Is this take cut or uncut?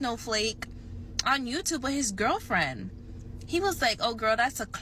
uncut